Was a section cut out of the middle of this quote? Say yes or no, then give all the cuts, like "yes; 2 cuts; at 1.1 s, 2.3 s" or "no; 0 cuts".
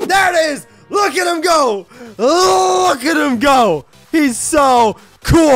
no; 0 cuts